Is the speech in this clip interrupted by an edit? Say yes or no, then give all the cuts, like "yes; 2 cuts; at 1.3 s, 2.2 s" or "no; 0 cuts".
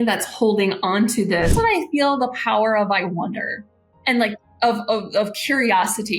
yes; 1 cut; at 1.5 s